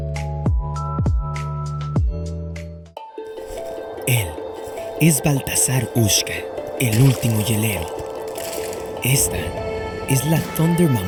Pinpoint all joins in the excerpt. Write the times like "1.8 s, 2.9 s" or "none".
none